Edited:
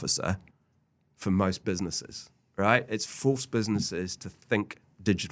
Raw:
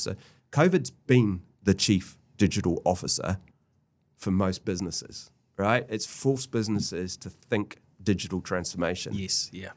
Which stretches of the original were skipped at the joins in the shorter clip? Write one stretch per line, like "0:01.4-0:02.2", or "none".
none